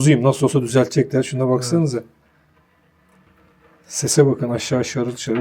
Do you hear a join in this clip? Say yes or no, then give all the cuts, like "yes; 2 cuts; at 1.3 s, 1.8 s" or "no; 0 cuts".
yes; 1 cut; at 3.3 s